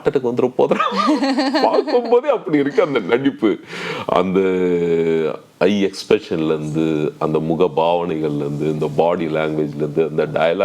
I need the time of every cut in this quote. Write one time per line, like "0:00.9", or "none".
none